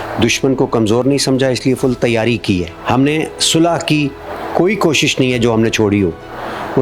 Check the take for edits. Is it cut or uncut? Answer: cut